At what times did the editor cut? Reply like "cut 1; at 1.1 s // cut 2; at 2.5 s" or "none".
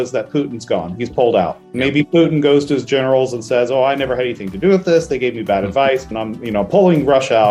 cut 1; at 6.2 s